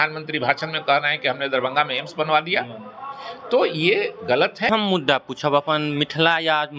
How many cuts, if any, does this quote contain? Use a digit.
1